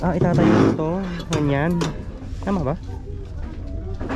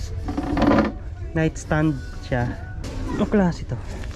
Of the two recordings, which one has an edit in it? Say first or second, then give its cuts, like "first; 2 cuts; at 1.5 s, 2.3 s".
second; 1 cut; at 2.9 s